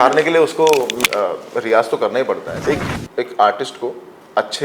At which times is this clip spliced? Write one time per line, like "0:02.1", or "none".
0:02.5